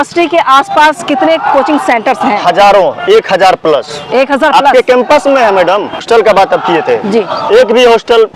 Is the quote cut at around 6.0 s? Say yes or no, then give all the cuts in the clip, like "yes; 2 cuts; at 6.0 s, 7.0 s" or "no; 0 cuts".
yes; 1 cut; at 6.0 s